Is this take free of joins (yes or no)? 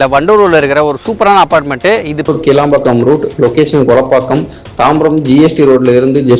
no